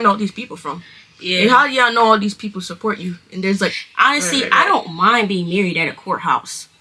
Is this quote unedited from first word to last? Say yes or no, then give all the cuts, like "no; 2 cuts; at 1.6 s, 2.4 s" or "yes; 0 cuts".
no; 1 cut; at 3.8 s